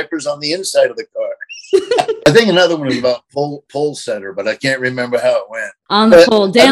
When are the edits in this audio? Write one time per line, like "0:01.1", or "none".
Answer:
0:02.3
0:05.7